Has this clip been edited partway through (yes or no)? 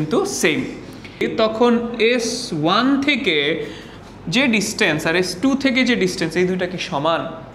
yes